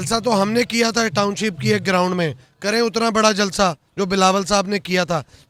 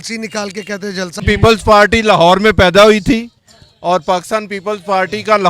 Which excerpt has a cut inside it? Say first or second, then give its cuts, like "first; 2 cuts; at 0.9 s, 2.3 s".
second; 1 cut; at 1.2 s